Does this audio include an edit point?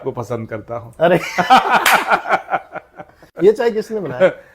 yes; 1 cut; at 3.2 s

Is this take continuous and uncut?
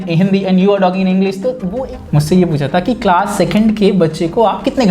no; 1 cut; at 1.7 s

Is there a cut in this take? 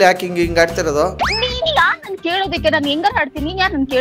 yes; 1 cut; at 1.2 s

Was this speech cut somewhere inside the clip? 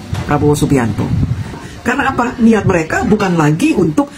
yes; 1 cut; at 1.6 s

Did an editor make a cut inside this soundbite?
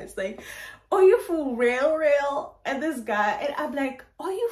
no; 0 cuts

